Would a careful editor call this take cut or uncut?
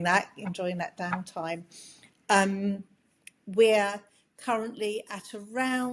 uncut